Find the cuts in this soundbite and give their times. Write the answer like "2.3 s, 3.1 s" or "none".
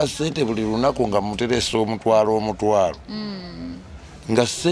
none